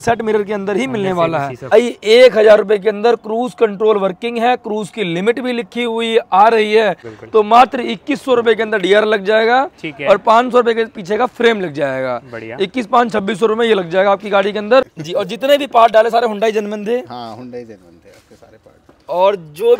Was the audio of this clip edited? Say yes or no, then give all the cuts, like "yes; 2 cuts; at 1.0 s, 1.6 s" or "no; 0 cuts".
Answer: yes; 3 cuts; at 1.7 s, 7.1 s, 14.9 s